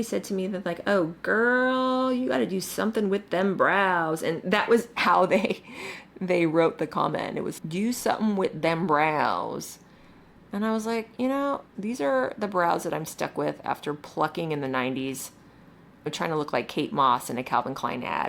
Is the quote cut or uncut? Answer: cut